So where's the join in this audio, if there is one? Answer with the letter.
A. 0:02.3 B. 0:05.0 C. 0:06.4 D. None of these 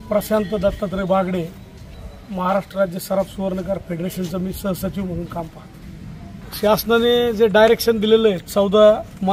C